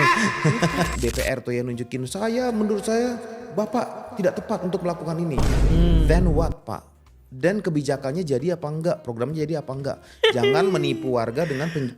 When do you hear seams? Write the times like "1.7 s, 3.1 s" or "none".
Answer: 0.9 s